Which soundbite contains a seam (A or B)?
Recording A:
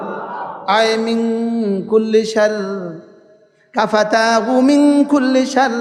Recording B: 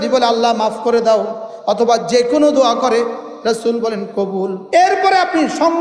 B